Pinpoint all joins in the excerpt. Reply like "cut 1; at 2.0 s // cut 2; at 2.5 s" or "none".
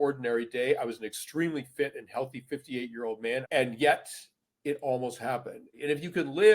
cut 1; at 3.4 s // cut 2; at 5.7 s